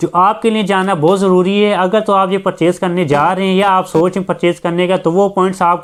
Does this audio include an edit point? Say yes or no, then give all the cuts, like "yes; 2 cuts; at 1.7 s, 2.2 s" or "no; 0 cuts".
no; 0 cuts